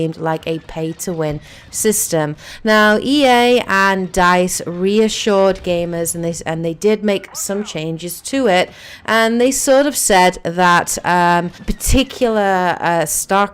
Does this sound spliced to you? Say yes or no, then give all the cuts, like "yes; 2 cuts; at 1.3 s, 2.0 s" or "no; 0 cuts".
yes; 1 cut; at 5.9 s